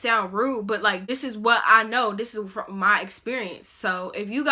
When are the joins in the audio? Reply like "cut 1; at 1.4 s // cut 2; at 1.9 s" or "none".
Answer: cut 1; at 1.1 s